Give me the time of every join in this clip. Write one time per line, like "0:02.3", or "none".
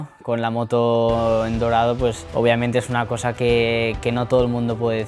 0:02.2